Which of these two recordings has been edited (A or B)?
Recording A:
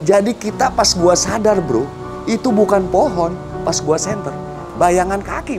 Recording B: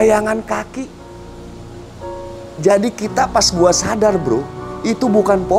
A